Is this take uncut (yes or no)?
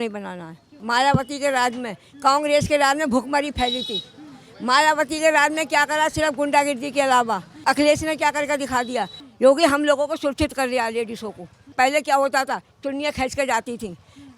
no